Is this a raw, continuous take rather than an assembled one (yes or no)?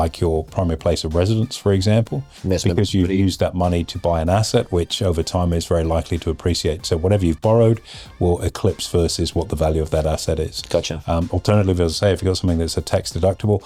yes